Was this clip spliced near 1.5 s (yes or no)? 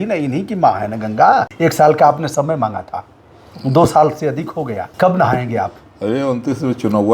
yes